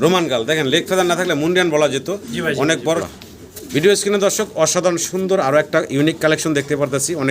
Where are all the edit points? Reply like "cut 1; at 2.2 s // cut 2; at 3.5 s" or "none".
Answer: cut 1; at 3.0 s

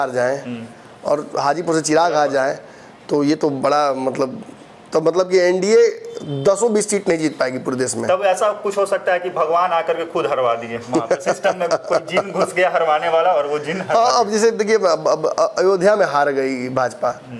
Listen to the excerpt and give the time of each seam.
none

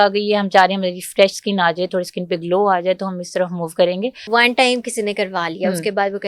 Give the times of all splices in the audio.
cut 1; at 4.3 s

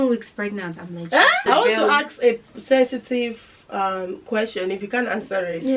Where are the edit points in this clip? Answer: cut 1; at 1.4 s

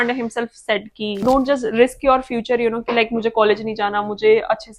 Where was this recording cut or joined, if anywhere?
cut 1; at 1.2 s

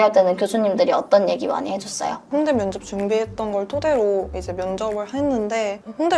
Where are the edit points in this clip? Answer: cut 1; at 2.2 s

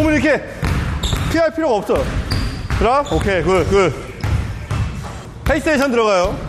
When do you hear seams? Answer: cut 1; at 4.2 s // cut 2; at 5.3 s

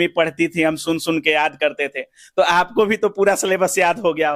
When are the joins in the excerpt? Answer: none

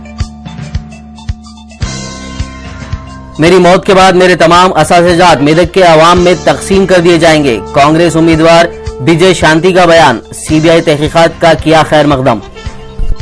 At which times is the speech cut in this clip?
cut 1; at 3.0 s

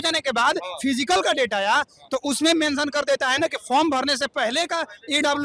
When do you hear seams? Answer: none

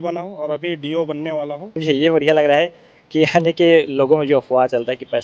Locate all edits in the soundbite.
cut 1; at 1.8 s

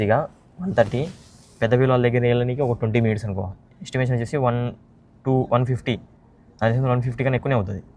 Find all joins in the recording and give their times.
none

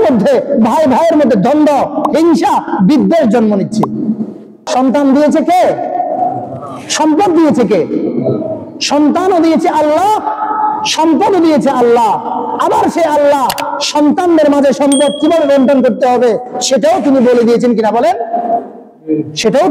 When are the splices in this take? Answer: cut 1; at 4.7 s

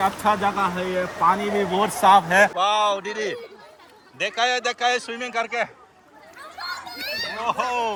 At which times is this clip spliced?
none

